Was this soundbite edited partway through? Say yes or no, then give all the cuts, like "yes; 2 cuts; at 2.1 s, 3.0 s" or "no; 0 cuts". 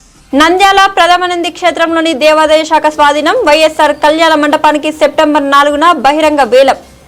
no; 0 cuts